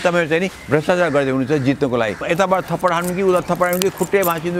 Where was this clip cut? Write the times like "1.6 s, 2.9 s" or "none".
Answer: 2.2 s